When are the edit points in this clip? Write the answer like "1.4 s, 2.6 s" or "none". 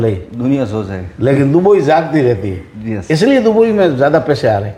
none

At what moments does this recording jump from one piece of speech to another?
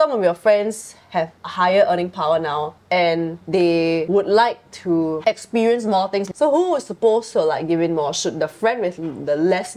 1.4 s, 2.8 s, 3.9 s, 6.3 s

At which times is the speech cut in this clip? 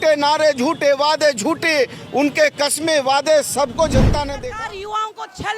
4.4 s

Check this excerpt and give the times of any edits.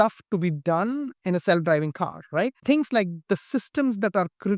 2.6 s

